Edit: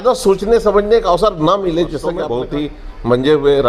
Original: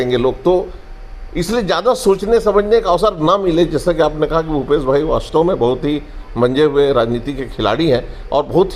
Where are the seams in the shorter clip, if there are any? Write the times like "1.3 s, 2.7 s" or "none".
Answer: 2.3 s